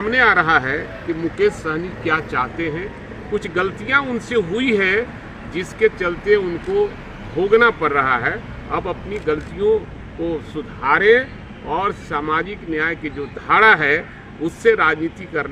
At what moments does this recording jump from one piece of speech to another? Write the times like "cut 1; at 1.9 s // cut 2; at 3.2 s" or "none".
none